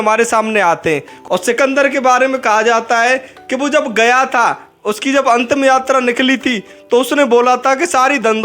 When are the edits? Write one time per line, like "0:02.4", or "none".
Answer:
0:01.1